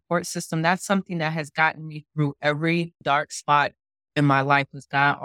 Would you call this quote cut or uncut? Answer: cut